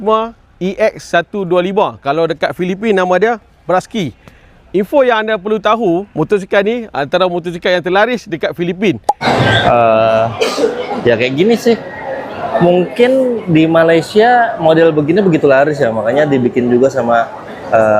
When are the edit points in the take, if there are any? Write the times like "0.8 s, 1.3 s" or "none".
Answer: 9.3 s